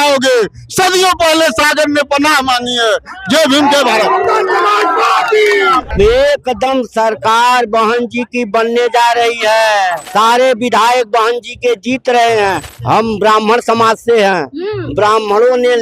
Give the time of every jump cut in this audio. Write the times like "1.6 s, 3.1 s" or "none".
5.9 s, 10.0 s, 12.7 s